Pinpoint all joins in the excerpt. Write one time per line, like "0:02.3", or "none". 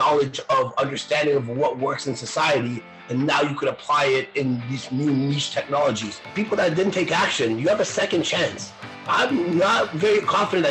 0:06.2